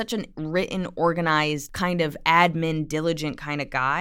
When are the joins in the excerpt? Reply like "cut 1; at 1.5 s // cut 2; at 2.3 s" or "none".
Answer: cut 1; at 1.7 s